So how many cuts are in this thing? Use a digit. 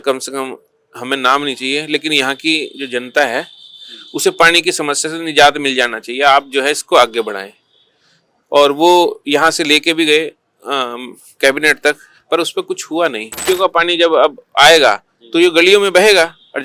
1